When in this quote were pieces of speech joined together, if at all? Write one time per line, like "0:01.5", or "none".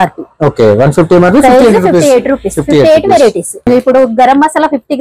0:03.7